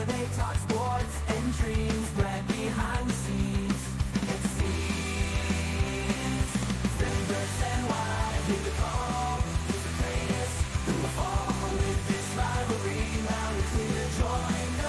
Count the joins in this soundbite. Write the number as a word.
zero